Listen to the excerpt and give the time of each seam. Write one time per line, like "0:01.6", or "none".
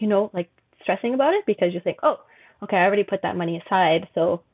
none